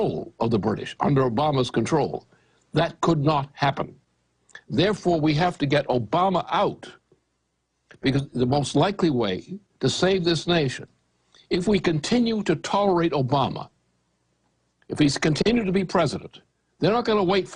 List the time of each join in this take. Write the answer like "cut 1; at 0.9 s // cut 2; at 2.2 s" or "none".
none